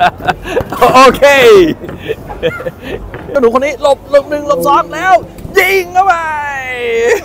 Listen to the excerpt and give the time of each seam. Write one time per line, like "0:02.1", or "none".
0:03.3